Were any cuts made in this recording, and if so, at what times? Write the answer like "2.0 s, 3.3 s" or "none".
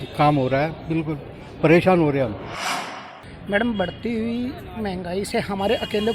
2.8 s